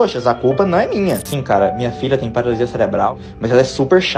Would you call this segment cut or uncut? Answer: cut